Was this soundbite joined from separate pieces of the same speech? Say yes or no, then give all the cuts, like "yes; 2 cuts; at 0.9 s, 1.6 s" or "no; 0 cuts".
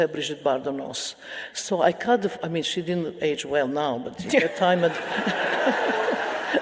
no; 0 cuts